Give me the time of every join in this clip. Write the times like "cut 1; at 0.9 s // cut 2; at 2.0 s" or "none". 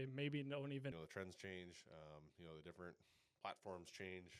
cut 1; at 0.9 s